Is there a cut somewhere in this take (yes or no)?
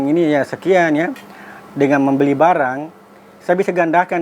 no